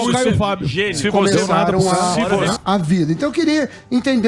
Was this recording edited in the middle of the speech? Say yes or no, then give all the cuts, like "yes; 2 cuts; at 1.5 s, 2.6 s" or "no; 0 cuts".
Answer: yes; 1 cut; at 2.5 s